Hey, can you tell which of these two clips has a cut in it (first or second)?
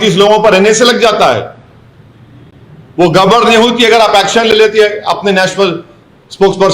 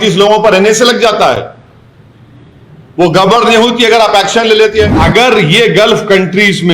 second